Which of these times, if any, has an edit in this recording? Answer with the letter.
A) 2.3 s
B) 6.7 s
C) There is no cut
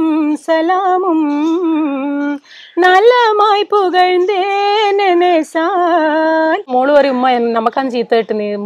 B